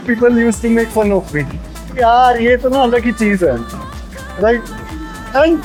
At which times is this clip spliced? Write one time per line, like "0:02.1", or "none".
none